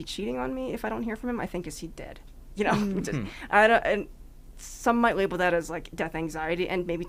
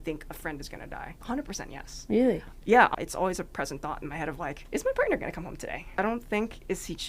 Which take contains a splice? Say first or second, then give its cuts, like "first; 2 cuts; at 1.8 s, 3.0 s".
second; 4 cuts; at 1.2 s, 2.9 s, 4.6 s, 6.0 s